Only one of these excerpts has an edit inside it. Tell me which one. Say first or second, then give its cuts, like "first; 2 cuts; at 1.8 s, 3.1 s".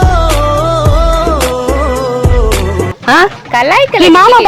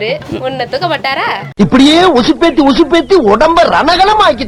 first; 1 cut; at 2.9 s